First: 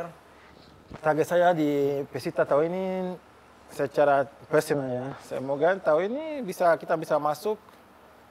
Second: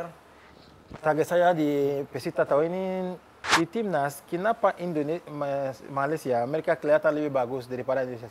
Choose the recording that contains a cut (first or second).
second